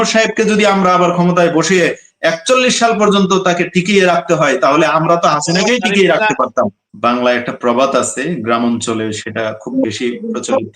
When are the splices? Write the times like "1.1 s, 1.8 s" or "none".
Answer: 6.8 s